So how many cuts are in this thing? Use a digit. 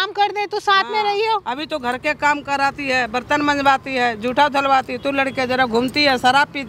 0